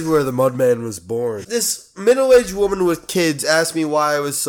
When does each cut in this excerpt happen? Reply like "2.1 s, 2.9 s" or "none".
1.4 s